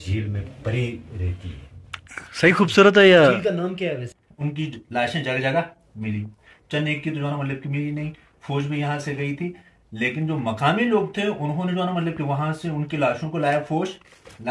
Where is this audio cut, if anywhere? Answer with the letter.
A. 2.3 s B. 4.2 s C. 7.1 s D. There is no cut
B